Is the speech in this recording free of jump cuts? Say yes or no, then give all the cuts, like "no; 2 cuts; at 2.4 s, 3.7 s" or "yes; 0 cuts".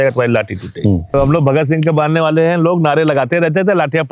no; 1 cut; at 1.1 s